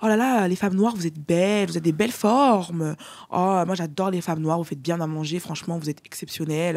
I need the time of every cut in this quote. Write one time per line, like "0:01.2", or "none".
none